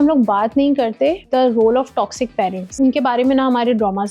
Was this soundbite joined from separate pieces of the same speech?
yes; 1 cut; at 1.3 s

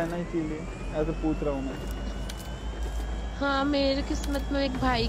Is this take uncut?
yes; 0 cuts

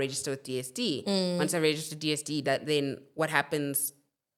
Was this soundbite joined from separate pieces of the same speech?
no; 0 cuts

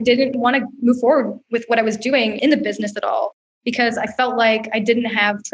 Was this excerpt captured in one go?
yes; 0 cuts

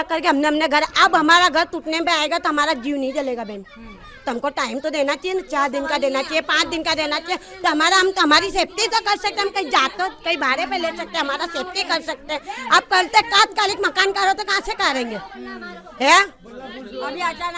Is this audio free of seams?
yes; 0 cuts

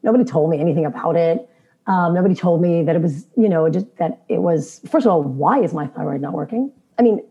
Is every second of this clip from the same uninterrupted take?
yes; 0 cuts

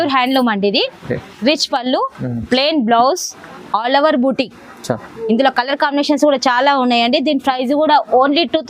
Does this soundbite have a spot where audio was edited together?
no; 0 cuts

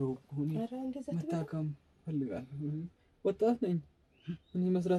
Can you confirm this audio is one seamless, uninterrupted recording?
yes; 0 cuts

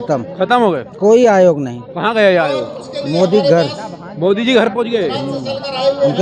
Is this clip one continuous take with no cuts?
yes; 0 cuts

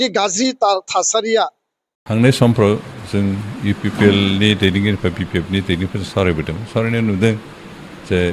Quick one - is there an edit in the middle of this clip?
yes; 1 cut; at 2.1 s

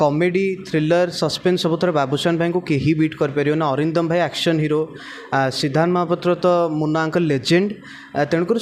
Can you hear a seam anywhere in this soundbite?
no; 0 cuts

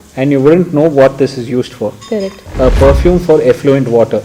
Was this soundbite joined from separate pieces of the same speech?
yes; 1 cut; at 2.4 s

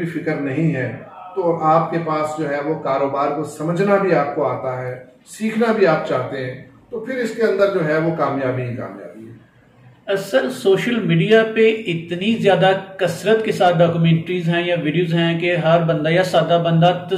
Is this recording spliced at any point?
no; 0 cuts

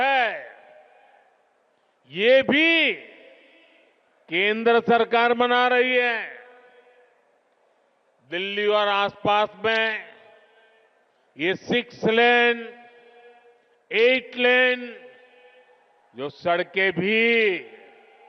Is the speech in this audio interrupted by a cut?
no; 0 cuts

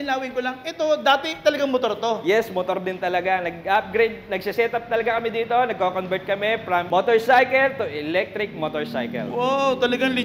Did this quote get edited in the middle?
no; 0 cuts

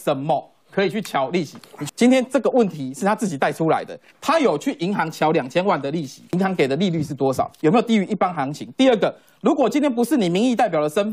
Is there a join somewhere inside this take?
yes; 2 cuts; at 1.8 s, 6.2 s

